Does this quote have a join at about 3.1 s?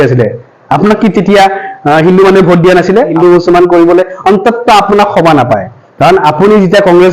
yes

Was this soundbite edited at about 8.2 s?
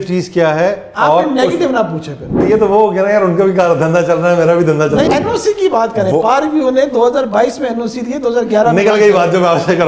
no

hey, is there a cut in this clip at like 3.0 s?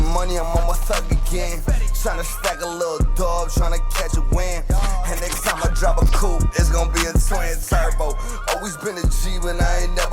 no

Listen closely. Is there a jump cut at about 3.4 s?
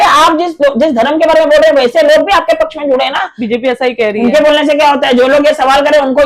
yes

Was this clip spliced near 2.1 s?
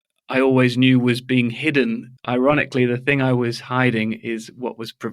yes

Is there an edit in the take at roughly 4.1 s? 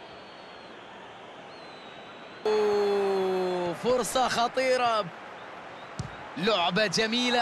no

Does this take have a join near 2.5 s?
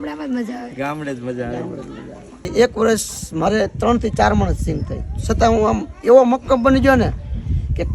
yes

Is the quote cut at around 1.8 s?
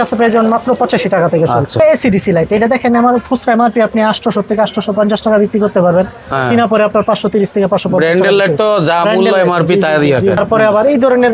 yes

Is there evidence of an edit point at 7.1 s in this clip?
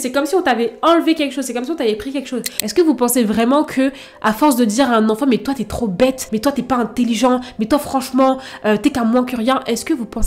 no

